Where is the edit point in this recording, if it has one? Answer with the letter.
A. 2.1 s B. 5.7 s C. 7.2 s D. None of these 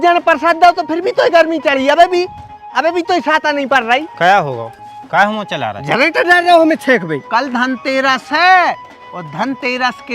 C